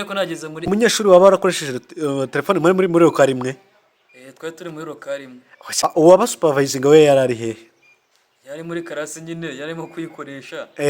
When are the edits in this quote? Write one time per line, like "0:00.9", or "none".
0:01.0
0:05.8